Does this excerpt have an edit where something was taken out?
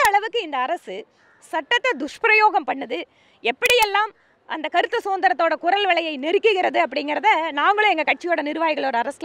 no; 0 cuts

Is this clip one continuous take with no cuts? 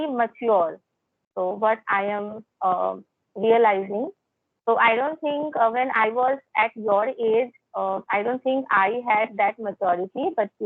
yes; 0 cuts

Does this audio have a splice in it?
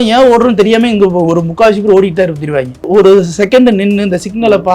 yes; 1 cut; at 2.9 s

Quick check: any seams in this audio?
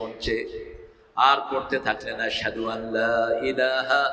no; 0 cuts

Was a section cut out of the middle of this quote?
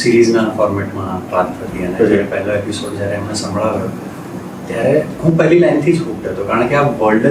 no; 0 cuts

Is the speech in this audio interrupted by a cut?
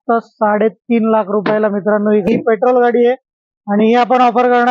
yes; 1 cut; at 2.3 s

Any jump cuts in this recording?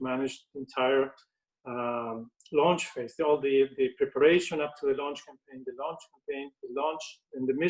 no; 0 cuts

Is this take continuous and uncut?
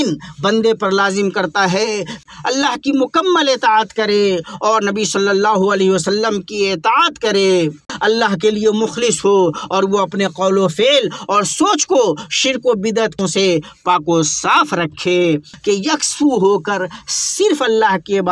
no; 4 cuts; at 2.2 s, 7.9 s, 13.2 s, 15.5 s

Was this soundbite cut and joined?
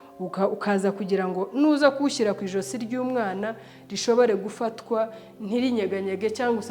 no; 0 cuts

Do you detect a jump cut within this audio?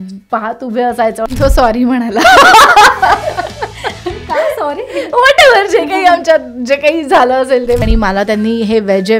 yes; 2 cuts; at 1.3 s, 7.8 s

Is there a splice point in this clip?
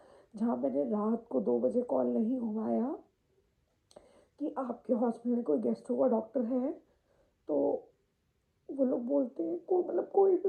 no; 0 cuts

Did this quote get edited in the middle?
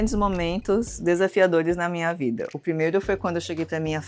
no; 0 cuts

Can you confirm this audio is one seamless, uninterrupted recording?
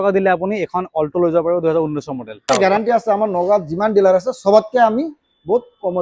no; 1 cut; at 2.5 s

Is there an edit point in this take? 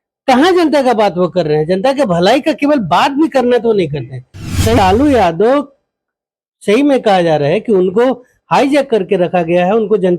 yes; 1 cut; at 4.8 s

